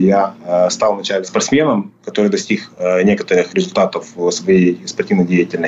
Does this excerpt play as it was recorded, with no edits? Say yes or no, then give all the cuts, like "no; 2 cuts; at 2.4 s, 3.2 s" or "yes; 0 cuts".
no; 1 cut; at 1.2 s